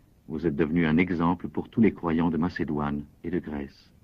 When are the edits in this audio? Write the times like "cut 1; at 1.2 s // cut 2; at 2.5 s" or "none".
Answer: cut 1; at 1.2 s